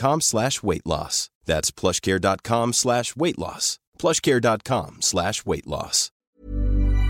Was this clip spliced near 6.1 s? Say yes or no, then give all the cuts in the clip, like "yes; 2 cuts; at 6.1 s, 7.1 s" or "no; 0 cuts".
yes; 1 cut; at 6.1 s